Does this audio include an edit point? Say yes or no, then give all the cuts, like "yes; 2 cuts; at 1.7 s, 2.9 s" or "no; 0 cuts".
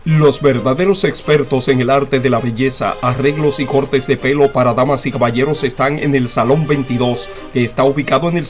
no; 0 cuts